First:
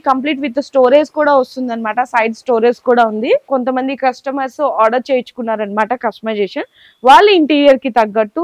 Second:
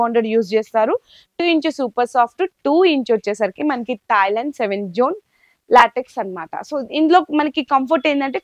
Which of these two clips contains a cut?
first; 1 cut; at 3.4 s

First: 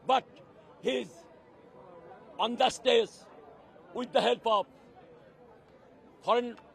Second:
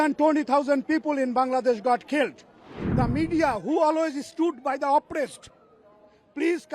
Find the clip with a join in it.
second; 1 cut; at 2.8 s

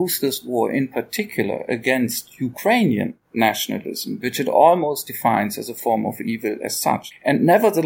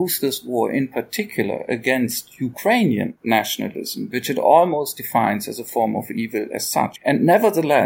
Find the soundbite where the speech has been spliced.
second; 2 cuts; at 3.2 s, 7.0 s

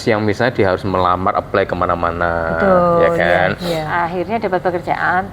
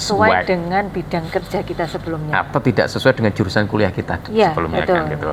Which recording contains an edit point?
first; 1 cut; at 3.9 s

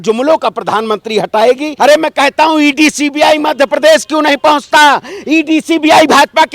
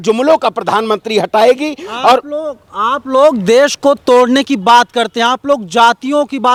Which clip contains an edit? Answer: first; 1 cut; at 1.7 s

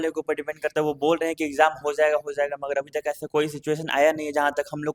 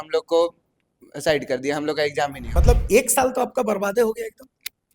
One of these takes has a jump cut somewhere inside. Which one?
second; 1 cut; at 2.4 s

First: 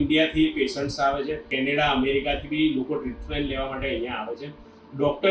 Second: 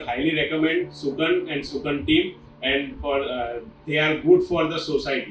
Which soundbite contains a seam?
first; 1 cut; at 1.5 s

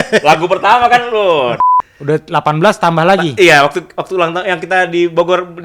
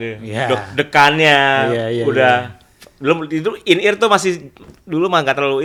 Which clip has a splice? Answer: first; 1 cut; at 1.6 s

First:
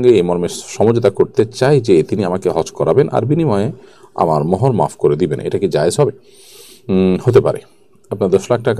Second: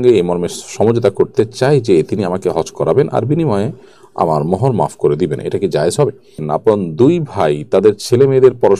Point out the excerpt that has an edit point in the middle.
second; 1 cut; at 6.3 s

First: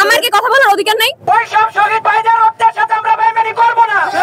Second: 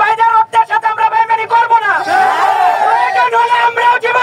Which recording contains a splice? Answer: first; 1 cut; at 1.1 s

